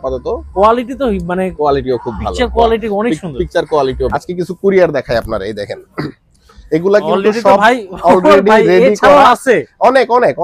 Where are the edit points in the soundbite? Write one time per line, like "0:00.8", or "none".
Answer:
0:04.1